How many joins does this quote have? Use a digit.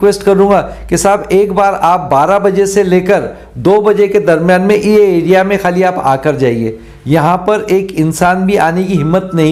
0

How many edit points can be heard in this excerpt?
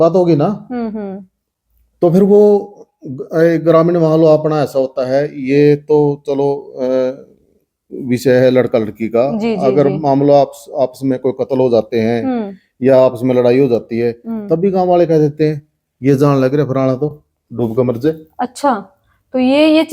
0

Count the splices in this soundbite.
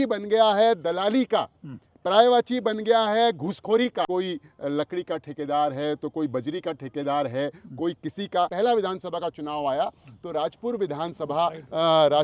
2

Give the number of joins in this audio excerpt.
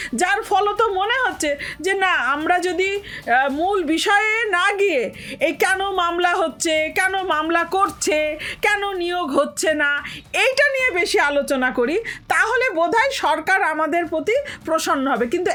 0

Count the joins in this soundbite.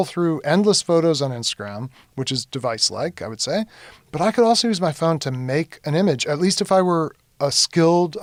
0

